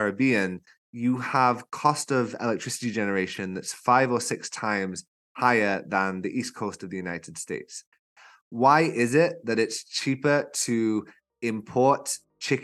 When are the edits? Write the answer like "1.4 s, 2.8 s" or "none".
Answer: 8.1 s